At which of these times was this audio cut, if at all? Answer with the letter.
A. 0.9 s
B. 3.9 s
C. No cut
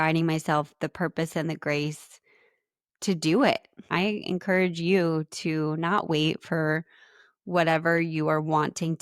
B